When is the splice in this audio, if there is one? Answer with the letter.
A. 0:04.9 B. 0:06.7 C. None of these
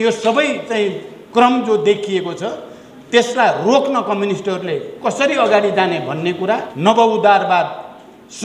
B